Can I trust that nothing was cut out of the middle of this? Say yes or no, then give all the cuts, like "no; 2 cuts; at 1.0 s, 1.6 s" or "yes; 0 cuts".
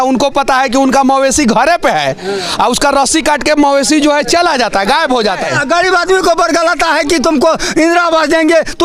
no; 1 cut; at 5.4 s